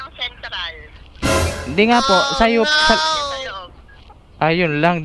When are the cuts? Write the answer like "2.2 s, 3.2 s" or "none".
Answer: none